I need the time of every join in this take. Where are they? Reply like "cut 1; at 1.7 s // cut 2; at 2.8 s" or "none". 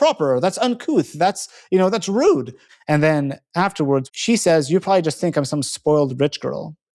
cut 1; at 2.6 s // cut 2; at 4.1 s

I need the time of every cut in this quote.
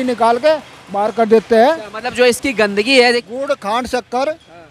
cut 1; at 3.2 s

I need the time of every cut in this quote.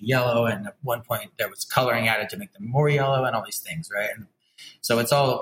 none

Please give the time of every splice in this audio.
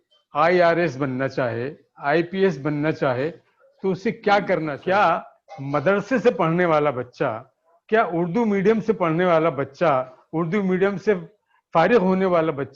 cut 1; at 4.7 s

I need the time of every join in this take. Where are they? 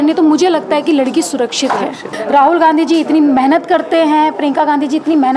cut 1; at 2.1 s

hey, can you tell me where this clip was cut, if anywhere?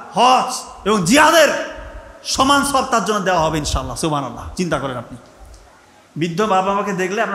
none

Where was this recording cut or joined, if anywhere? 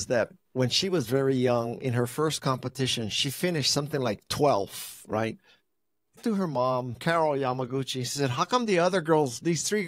cut 1; at 6.2 s

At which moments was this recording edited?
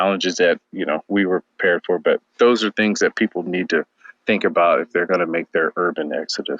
none

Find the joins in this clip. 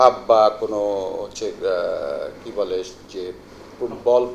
none

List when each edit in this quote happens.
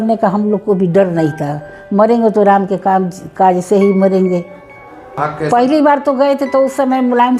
cut 1; at 5.2 s

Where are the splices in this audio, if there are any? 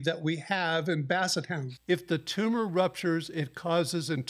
cut 1; at 1.6 s

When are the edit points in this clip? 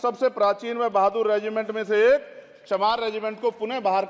none

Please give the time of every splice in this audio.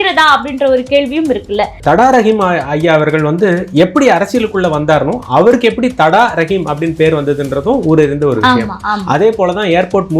cut 1; at 1.8 s

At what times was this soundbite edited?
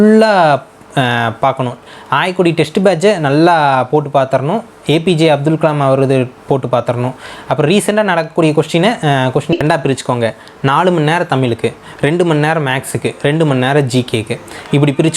cut 1; at 9.5 s

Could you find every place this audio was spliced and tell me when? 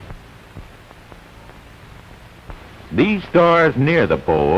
cut 1; at 3.3 s

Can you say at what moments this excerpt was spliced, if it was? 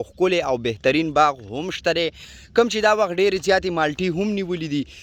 none

